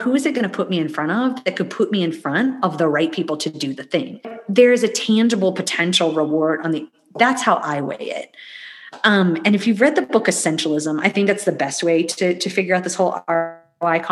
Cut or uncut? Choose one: cut